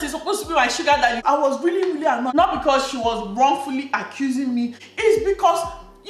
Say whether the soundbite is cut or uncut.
cut